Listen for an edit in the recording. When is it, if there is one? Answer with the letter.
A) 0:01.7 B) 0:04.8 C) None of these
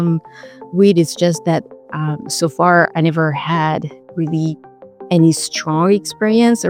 C